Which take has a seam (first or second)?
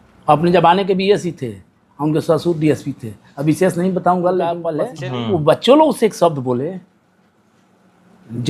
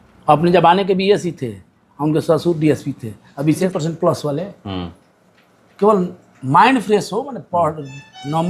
second